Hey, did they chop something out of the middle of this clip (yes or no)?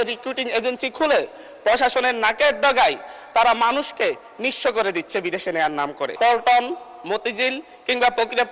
yes